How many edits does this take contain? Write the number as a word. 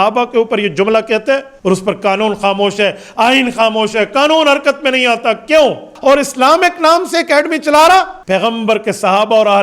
three